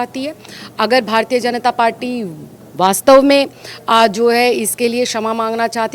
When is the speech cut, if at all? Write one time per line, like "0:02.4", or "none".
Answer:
none